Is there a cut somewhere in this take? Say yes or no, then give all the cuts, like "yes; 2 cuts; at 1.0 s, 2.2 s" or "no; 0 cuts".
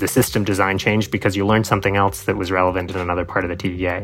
no; 0 cuts